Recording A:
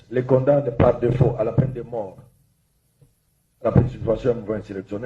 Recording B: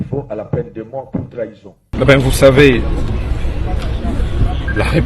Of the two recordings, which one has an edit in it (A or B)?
B